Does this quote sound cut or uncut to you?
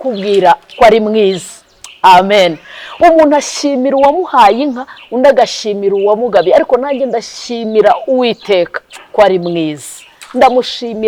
uncut